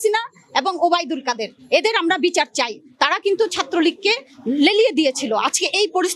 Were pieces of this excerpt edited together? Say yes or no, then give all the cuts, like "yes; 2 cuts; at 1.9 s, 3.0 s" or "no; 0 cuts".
no; 0 cuts